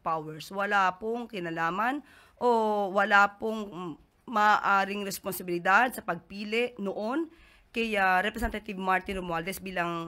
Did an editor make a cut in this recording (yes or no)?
no